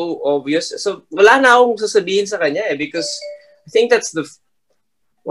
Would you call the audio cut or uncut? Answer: uncut